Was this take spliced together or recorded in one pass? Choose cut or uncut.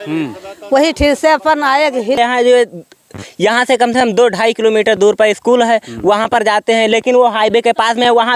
cut